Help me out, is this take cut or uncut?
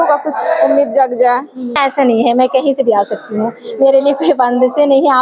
cut